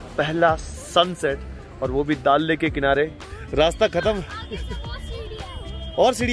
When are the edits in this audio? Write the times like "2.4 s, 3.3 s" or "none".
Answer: 3.3 s

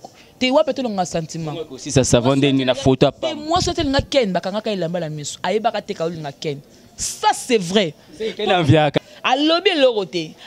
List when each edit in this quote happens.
9.0 s

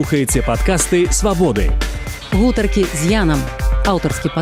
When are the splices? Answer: none

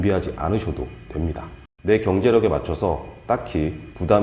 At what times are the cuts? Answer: 1.6 s

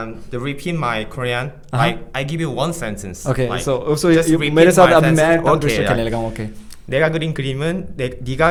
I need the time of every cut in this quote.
none

